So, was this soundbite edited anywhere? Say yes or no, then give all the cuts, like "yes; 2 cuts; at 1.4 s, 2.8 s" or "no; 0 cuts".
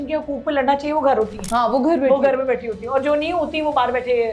yes; 1 cut; at 1.4 s